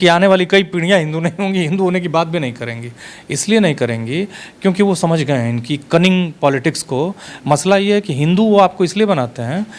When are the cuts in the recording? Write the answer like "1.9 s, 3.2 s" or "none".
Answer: none